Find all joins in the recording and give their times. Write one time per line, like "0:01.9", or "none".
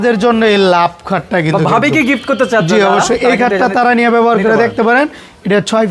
none